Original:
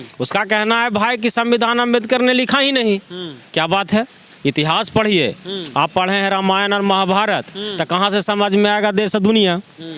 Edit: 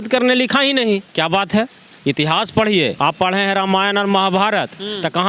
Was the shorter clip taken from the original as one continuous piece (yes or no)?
no